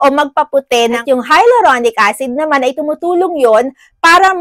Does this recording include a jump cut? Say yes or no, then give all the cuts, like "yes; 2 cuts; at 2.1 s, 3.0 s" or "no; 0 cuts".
yes; 1 cut; at 1.0 s